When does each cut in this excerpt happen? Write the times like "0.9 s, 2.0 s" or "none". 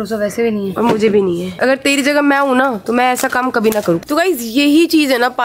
1.5 s